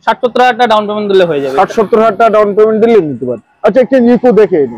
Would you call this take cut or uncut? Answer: uncut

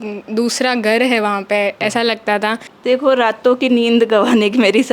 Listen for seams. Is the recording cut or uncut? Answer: cut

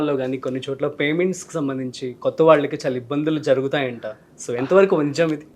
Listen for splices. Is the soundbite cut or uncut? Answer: uncut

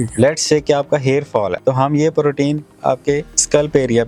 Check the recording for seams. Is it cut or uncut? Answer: uncut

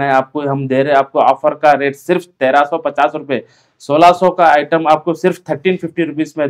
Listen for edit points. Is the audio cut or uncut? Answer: uncut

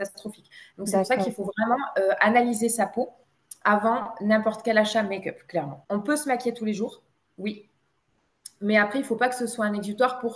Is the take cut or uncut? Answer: cut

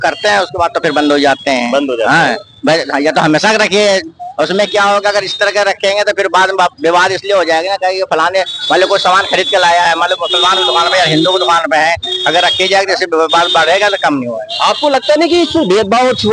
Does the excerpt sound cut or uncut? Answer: uncut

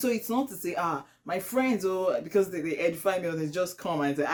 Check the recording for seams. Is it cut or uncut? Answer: uncut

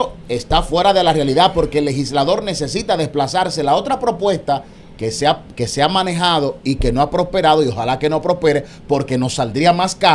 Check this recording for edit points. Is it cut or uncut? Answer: uncut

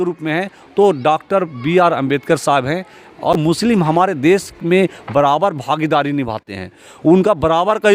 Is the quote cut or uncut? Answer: cut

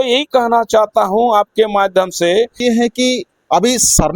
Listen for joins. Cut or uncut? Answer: cut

